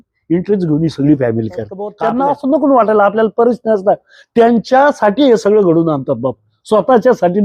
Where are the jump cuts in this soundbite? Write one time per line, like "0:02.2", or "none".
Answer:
0:01.9